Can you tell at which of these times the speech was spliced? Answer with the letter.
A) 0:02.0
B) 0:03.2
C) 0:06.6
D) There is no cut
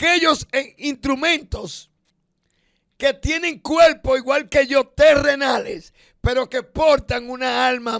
D